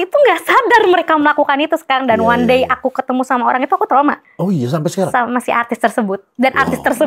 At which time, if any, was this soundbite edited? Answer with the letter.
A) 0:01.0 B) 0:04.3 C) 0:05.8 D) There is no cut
B